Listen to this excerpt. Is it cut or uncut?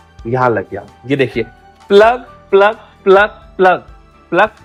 uncut